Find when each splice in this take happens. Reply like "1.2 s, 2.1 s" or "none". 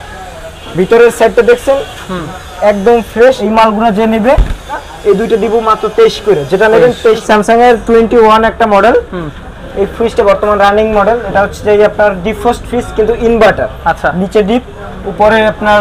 3.4 s, 4.8 s, 7.2 s